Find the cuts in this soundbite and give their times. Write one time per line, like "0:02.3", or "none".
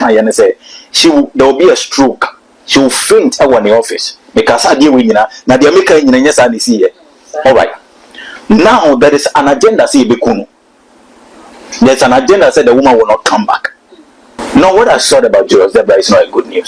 0:14.4